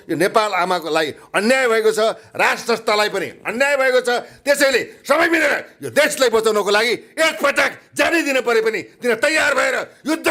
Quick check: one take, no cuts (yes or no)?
yes